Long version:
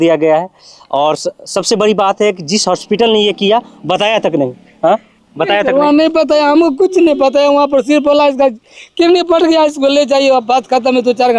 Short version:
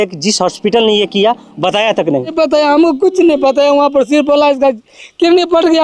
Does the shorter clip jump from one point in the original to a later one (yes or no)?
yes